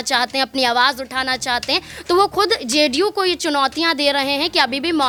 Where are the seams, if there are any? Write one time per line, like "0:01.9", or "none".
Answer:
none